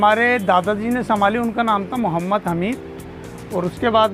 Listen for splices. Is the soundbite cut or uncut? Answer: uncut